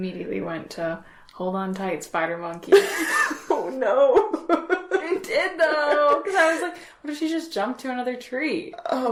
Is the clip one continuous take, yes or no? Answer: yes